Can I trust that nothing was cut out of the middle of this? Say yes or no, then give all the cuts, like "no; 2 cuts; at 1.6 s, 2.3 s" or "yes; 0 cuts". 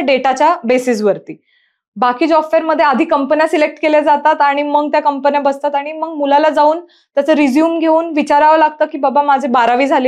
yes; 0 cuts